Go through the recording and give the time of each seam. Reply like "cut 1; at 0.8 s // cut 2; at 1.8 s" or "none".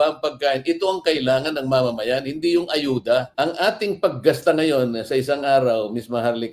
cut 1; at 3.3 s